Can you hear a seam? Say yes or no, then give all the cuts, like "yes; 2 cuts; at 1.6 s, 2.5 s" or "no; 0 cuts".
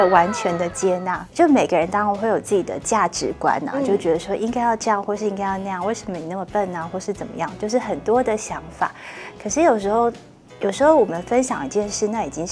no; 0 cuts